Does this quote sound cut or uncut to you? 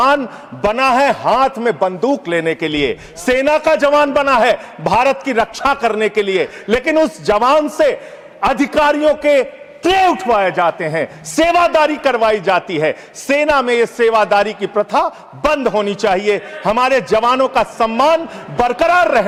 uncut